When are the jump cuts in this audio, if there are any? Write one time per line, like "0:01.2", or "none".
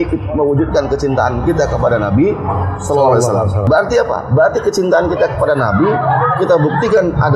0:03.6